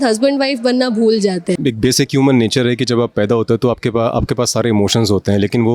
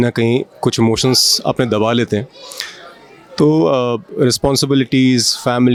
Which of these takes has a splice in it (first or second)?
first